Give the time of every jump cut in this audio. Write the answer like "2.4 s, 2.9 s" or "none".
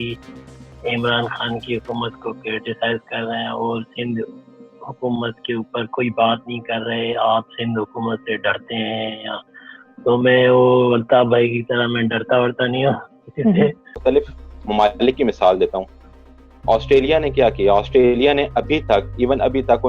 14.0 s